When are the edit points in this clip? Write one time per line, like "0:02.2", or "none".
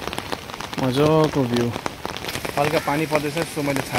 0:02.2